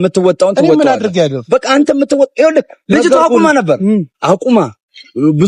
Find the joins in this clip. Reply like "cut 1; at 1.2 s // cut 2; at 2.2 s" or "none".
none